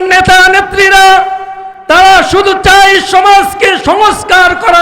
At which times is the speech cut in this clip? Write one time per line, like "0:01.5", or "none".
0:03.8